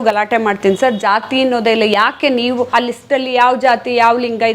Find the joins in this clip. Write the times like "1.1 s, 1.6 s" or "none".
2.7 s